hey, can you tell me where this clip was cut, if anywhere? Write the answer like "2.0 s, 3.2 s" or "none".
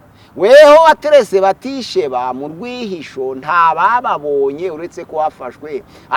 none